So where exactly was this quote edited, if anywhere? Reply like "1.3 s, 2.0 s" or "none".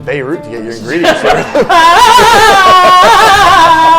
1.7 s

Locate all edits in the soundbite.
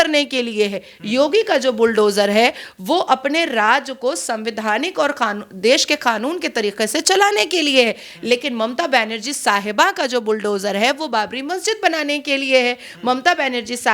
none

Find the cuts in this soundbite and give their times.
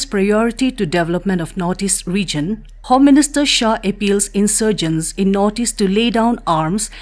2.7 s

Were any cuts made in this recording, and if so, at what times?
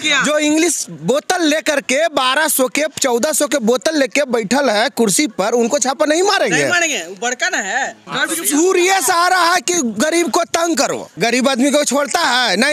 8.0 s, 11.0 s

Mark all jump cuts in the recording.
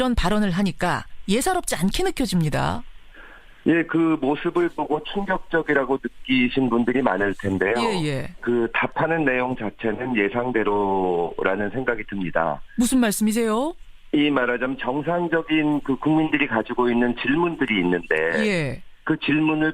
10.2 s

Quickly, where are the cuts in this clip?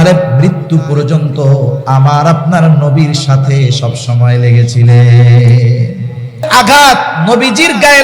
6.5 s

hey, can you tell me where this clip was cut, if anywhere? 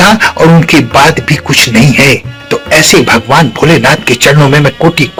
none

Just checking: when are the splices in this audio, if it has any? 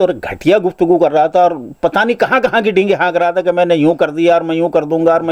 none

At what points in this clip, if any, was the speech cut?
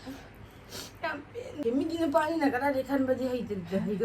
1.6 s

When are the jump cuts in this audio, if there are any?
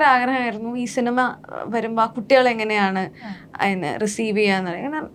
none

